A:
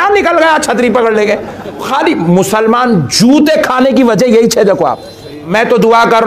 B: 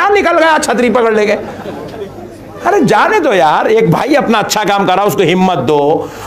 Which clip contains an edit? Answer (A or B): A